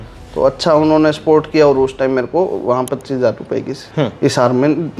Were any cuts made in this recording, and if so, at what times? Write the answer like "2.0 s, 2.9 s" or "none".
none